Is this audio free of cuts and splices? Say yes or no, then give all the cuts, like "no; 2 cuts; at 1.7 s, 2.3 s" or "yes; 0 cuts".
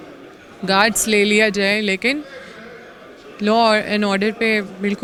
yes; 0 cuts